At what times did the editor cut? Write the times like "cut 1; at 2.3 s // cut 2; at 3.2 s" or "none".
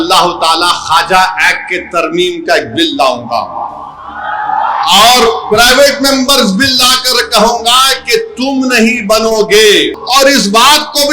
cut 1; at 10.0 s